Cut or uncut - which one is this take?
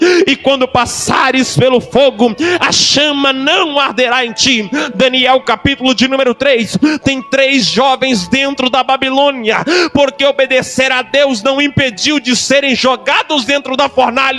uncut